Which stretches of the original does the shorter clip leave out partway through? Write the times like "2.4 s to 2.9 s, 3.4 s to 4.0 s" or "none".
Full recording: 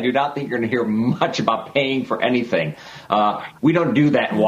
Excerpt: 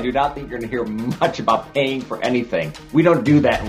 2.8 s to 3.5 s